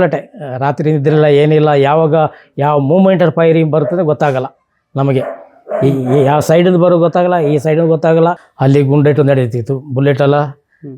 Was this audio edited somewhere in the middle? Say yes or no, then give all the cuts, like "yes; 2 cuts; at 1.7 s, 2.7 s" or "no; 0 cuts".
yes; 1 cut; at 8.5 s